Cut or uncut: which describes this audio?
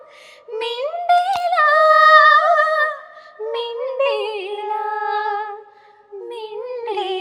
uncut